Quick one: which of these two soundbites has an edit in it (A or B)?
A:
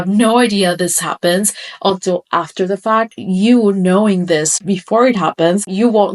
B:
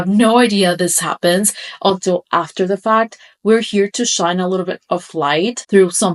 A